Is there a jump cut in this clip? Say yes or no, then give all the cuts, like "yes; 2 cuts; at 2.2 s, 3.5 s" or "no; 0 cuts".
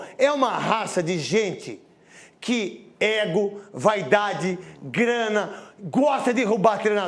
no; 0 cuts